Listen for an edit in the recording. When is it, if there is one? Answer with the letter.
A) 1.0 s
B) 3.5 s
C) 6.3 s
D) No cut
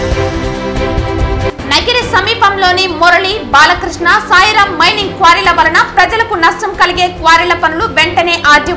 A